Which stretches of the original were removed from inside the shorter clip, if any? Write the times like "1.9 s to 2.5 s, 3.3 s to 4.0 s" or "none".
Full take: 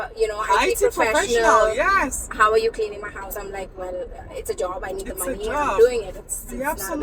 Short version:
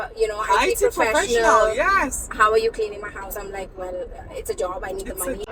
none

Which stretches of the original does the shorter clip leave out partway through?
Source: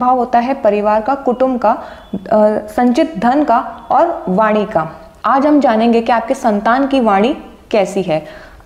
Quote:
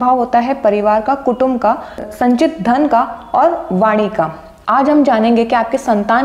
2.1 s to 2.6 s

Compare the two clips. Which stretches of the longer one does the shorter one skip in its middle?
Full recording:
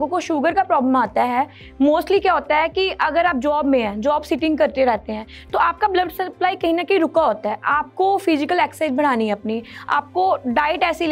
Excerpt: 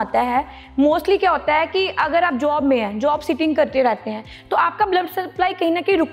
none

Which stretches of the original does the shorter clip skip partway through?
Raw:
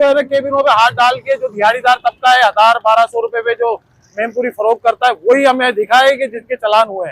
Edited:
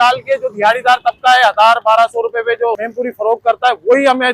3.9 s to 4.3 s

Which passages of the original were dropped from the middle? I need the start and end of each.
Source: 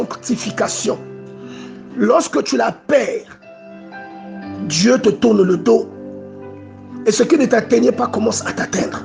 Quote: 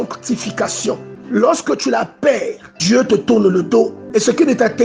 1.1 s to 1.8 s, 3.4 s to 4.6 s, 5.9 s to 6.9 s

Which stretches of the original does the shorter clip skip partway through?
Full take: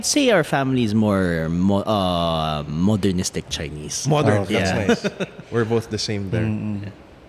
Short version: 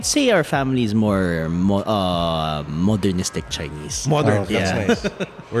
none

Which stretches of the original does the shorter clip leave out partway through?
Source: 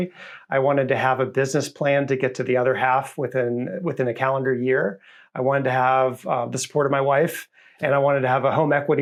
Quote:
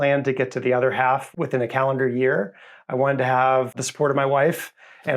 3.1 s to 3.7 s, 6.2 s to 6.5 s

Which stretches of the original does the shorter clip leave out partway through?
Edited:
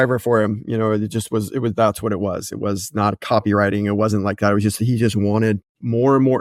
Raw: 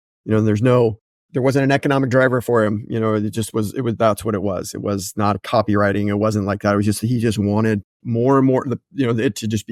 none

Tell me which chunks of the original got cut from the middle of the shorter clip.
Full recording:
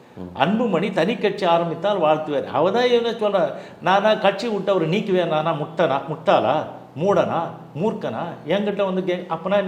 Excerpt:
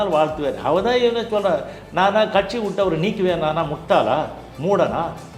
5.7 s to 6.1 s

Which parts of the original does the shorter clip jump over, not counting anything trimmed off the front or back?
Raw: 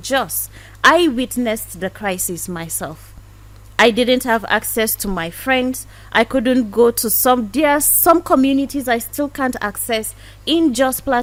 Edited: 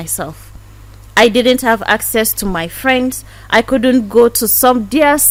none

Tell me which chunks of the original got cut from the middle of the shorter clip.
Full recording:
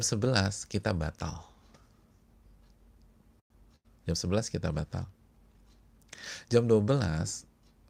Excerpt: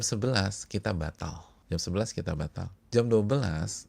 1.5 s to 3.8 s, 5.1 s to 6.3 s

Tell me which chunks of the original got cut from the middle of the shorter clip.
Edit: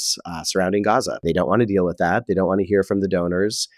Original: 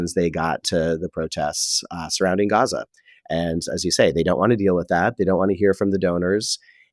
2.9 s to 4.1 s

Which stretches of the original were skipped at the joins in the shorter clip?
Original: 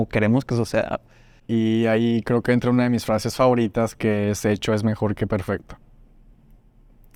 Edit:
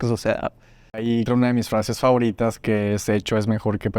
1.6 s to 2.5 s

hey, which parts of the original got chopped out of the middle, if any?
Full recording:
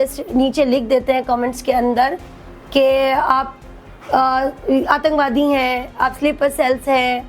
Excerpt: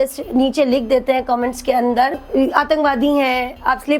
2.2 s to 4.6 s

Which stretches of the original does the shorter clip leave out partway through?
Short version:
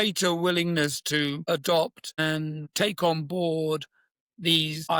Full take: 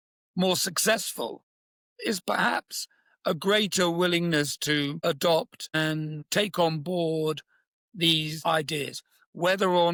none

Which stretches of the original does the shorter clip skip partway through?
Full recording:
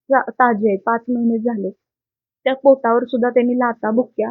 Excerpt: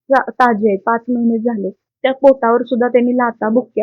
1.8 s to 2.2 s

